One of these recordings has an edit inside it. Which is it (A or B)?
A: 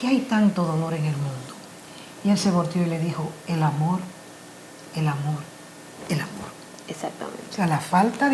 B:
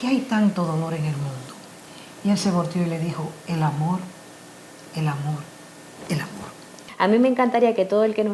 B